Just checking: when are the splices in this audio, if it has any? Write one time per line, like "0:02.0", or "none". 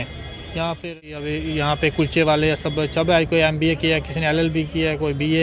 0:00.9